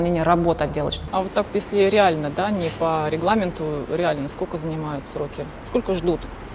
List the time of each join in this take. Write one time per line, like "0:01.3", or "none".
0:01.0